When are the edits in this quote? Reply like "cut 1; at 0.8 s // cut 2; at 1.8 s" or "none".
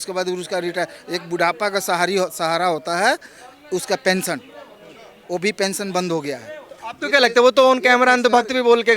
none